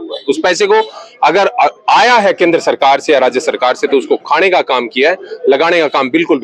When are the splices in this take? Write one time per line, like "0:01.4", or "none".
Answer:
none